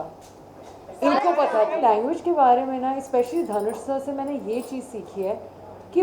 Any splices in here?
yes; 1 cut; at 1.8 s

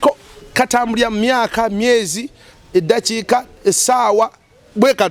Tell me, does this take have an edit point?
no; 0 cuts

